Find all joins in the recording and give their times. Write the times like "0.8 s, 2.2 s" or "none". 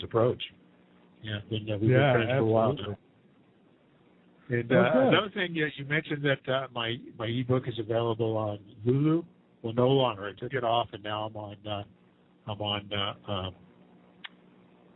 none